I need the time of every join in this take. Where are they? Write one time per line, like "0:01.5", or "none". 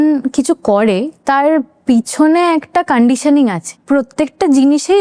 0:03.7